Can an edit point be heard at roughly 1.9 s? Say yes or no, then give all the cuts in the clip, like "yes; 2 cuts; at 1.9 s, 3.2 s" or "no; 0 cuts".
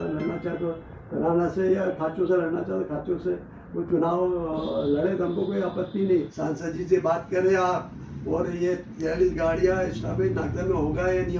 no; 1 cut; at 6.4 s